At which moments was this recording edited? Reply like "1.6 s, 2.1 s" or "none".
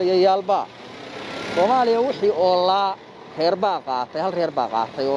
none